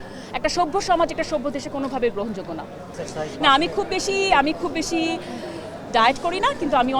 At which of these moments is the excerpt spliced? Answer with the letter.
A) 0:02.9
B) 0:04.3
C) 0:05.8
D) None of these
A